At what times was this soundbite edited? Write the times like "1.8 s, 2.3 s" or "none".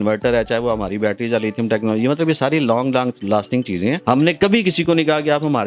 4.0 s